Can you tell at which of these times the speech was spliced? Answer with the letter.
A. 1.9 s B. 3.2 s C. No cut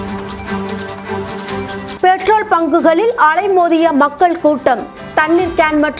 A